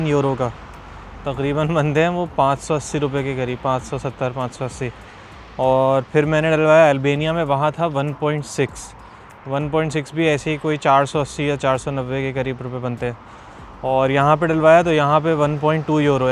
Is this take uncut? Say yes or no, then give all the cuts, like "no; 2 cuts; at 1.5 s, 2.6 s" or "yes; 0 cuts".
yes; 0 cuts